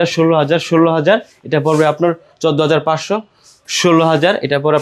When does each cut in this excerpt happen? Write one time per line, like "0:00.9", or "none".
none